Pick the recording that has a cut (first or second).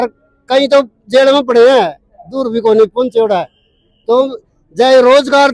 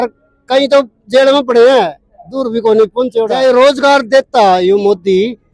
second